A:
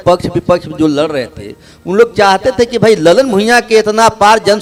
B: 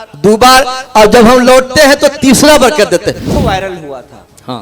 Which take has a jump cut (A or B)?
B